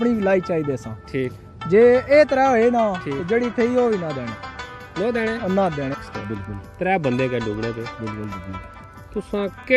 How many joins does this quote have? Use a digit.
1